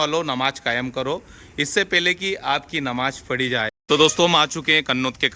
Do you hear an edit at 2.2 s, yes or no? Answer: no